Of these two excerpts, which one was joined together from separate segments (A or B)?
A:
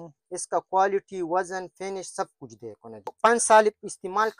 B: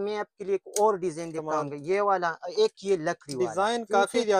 A